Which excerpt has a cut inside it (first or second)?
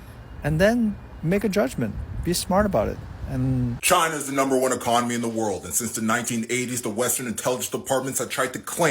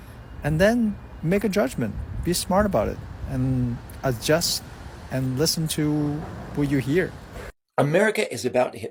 first